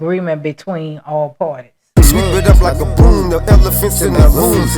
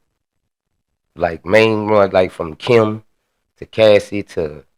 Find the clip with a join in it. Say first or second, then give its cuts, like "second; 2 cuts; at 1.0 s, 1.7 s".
first; 1 cut; at 1.7 s